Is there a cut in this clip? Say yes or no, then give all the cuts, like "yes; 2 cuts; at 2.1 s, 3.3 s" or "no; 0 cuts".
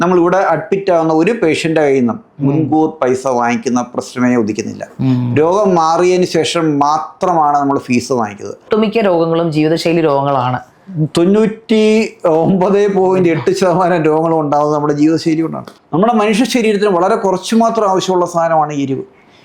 yes; 2 cuts; at 8.6 s, 15.6 s